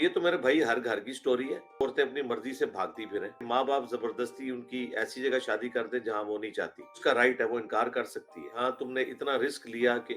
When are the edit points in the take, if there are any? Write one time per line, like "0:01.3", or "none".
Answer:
0:01.8
0:03.4
0:07.0
0:08.5